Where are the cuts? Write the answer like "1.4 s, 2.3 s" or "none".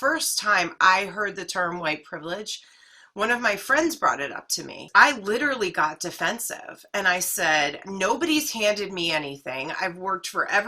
4.8 s